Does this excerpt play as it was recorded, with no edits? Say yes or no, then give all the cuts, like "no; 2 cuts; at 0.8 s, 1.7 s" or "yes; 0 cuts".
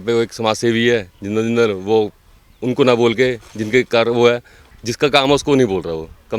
no; 1 cut; at 4.6 s